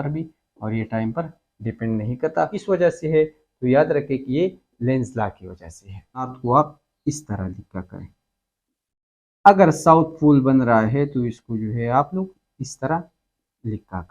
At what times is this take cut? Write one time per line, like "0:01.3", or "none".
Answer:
0:02.6
0:06.3

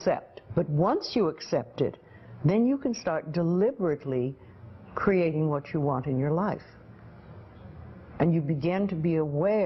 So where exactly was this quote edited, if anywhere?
0:05.5

